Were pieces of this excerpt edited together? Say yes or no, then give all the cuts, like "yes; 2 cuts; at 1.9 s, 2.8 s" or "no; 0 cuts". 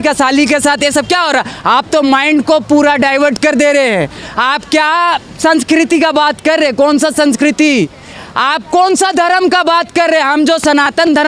no; 0 cuts